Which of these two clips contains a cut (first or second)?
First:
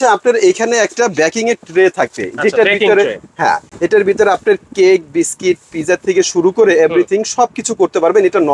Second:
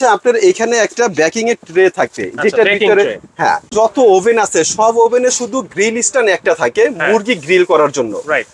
second